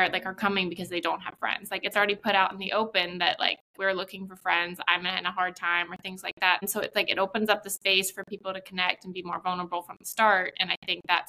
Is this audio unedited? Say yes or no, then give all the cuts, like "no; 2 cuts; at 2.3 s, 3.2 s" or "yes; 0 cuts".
no; 1 cut; at 6.7 s